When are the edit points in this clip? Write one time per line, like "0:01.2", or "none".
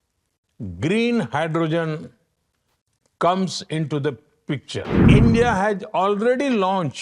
0:04.9